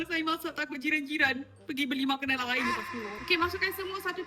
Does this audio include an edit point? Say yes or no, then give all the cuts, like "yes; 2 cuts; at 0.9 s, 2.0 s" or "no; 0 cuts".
yes; 1 cut; at 3.2 s